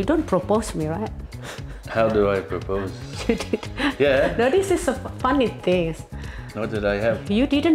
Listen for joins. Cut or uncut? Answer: uncut